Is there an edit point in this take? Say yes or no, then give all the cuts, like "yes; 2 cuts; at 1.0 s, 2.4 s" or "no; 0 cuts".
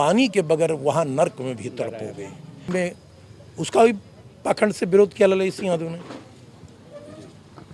yes; 1 cut; at 2.7 s